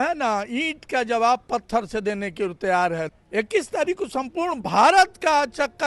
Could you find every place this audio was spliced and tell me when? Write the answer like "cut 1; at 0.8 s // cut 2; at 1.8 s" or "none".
cut 1; at 3.1 s